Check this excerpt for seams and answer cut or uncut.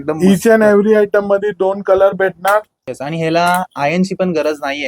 cut